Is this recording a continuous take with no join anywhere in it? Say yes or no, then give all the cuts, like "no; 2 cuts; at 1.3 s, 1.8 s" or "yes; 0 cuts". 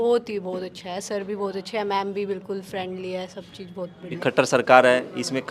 no; 1 cut; at 4.2 s